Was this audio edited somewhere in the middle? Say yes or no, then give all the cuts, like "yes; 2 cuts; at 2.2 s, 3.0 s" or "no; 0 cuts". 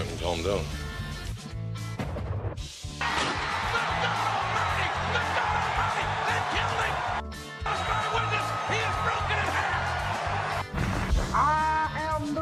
no; 0 cuts